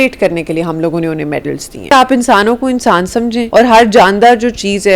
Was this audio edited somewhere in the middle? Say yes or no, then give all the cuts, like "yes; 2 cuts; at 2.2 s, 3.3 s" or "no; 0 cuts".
yes; 2 cuts; at 1.9 s, 3.5 s